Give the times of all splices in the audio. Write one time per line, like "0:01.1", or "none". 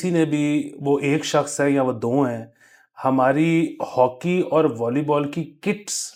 none